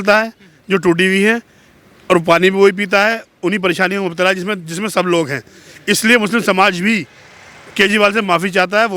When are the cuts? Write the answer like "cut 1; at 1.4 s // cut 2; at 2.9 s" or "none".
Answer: none